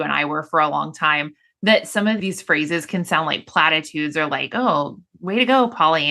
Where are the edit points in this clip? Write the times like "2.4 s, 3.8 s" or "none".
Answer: 2.2 s

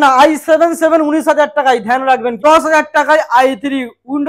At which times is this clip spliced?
2.4 s

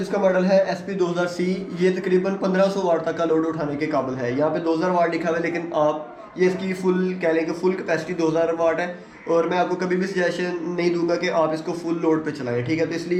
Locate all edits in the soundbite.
none

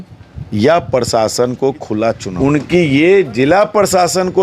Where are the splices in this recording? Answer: 2.3 s

